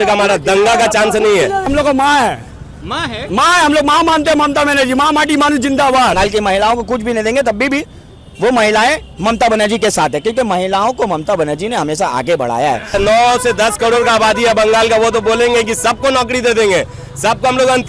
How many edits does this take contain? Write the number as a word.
three